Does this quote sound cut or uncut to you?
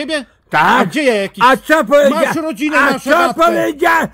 uncut